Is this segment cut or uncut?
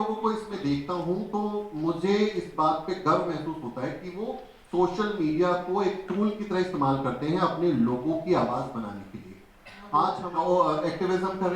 cut